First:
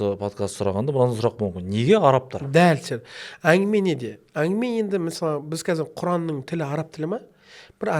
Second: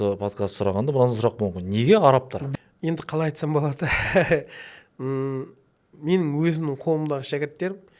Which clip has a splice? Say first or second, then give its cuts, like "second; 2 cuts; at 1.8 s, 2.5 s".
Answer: second; 1 cut; at 2.4 s